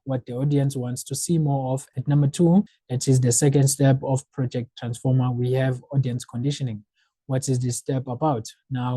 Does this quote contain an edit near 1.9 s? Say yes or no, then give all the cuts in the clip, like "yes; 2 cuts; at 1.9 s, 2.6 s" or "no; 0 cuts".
yes; 2 cuts; at 1.9 s, 2.7 s